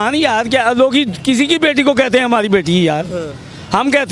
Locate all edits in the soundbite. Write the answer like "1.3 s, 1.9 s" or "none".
none